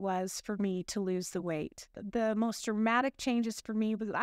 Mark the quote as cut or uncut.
cut